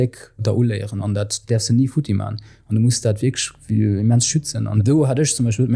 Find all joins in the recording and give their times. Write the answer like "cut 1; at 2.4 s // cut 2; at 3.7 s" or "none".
cut 1; at 1.2 s // cut 2; at 4.7 s